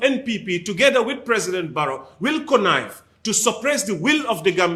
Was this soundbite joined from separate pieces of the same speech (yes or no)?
no